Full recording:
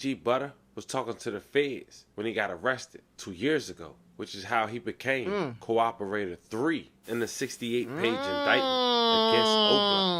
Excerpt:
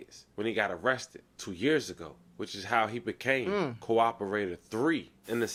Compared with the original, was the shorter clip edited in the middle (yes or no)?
no